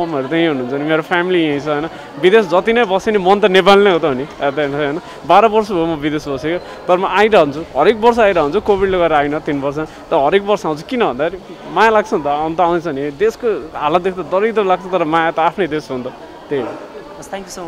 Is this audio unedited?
yes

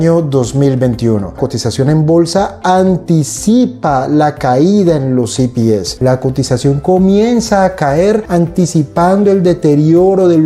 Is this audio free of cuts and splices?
no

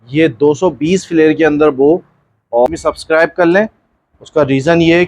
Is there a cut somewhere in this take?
yes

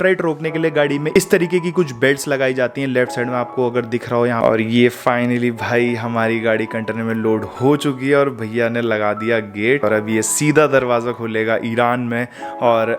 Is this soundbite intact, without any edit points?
no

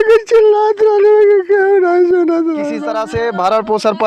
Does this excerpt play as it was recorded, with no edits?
no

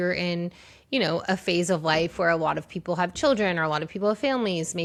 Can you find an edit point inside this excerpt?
no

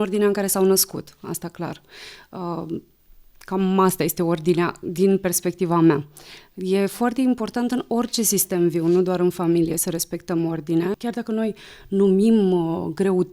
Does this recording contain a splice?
yes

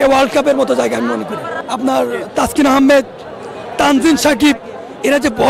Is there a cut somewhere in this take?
yes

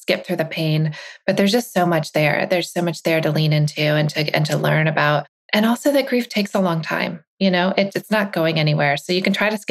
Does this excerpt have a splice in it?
yes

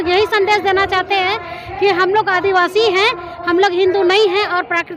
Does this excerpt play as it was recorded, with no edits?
yes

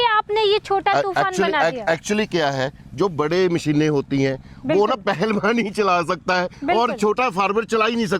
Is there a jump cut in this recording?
no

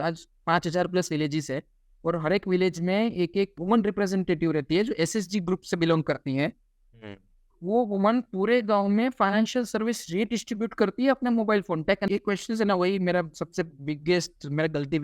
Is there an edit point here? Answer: yes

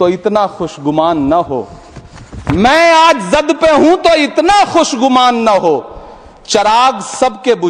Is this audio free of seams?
yes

